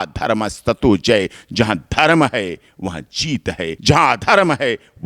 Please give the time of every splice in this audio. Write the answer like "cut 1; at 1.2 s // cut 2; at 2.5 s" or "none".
cut 1; at 3.8 s